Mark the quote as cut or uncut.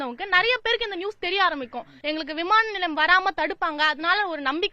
cut